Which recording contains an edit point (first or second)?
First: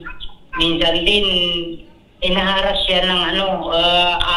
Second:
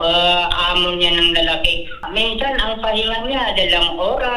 second